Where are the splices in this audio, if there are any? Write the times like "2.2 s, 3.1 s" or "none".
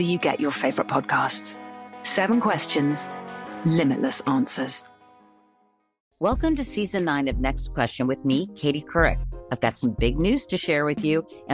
6.0 s